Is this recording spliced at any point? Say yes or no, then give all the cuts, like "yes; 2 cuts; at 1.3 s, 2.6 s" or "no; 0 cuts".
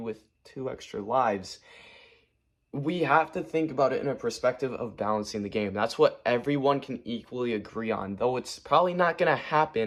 no; 0 cuts